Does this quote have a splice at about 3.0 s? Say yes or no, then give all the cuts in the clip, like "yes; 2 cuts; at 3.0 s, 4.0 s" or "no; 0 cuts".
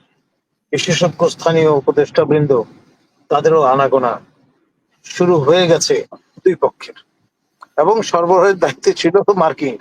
no; 1 cut; at 6.3 s